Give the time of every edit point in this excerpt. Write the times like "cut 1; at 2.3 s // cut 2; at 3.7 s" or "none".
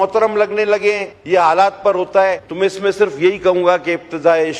cut 1; at 1.1 s // cut 2; at 2.4 s